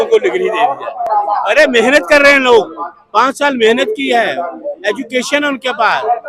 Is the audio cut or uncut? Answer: uncut